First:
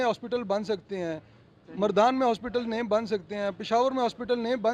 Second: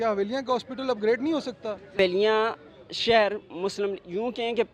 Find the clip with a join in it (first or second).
second